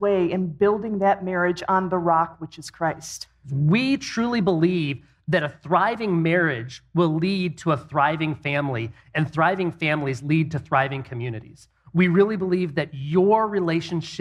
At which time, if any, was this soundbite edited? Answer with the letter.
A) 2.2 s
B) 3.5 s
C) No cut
B